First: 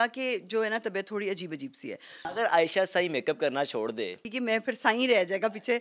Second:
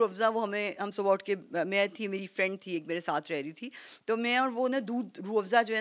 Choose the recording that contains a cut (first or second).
first